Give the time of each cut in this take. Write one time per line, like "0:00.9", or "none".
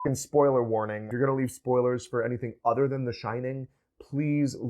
0:01.1